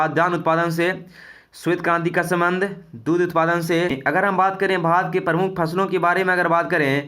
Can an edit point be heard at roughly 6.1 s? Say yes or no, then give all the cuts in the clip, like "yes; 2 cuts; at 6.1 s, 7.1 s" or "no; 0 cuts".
no; 1 cut; at 4.0 s